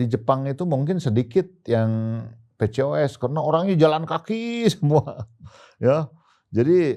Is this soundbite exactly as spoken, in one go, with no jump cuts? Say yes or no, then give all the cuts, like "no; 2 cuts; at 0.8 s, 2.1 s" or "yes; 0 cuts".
yes; 0 cuts